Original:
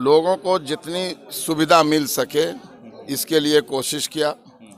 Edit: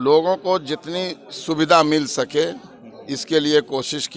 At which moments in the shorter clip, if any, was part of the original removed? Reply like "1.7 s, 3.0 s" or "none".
none